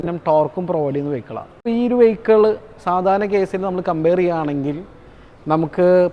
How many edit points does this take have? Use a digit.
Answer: 1